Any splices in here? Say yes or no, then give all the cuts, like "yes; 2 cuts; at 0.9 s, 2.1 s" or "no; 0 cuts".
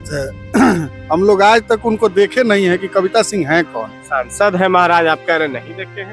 no; 0 cuts